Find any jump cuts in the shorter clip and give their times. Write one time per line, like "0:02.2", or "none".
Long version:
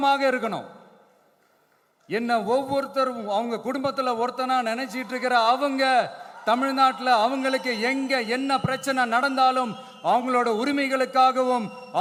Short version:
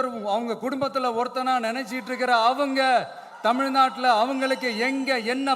none